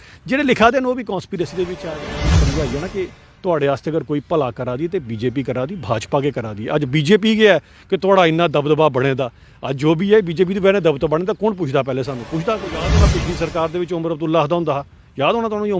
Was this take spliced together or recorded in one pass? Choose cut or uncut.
cut